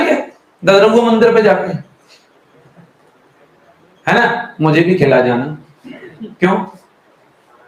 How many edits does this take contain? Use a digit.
0